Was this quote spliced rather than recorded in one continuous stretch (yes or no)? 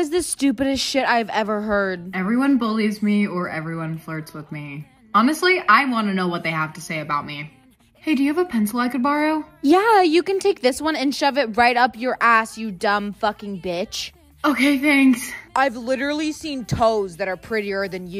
no